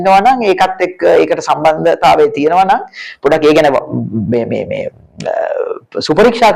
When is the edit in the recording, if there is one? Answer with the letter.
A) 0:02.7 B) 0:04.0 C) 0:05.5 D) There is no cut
D